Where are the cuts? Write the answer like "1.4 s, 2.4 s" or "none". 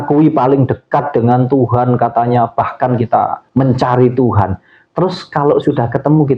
3.4 s

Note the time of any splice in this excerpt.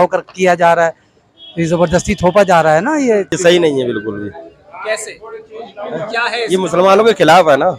3.4 s

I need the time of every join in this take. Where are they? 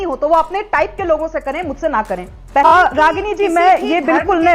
2.7 s

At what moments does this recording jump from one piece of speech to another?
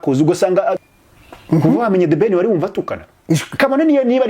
0.9 s

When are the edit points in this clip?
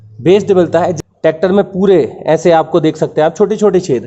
0.9 s

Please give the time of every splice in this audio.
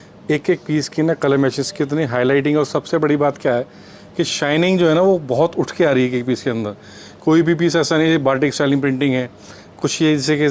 none

